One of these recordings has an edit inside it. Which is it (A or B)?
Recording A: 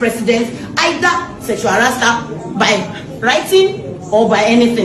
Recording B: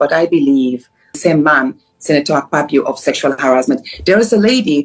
B